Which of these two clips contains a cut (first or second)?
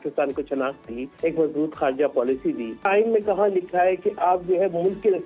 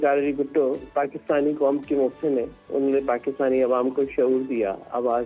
first